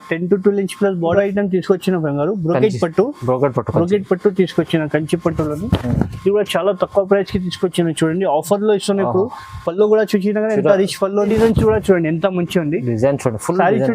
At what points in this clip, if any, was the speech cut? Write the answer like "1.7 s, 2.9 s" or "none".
1.1 s, 11.3 s